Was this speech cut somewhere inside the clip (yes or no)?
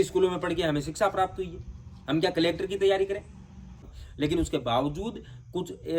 yes